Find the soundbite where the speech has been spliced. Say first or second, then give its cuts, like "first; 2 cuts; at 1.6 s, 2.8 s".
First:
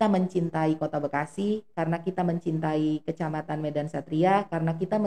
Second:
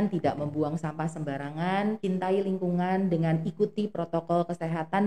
second; 1 cut; at 2.0 s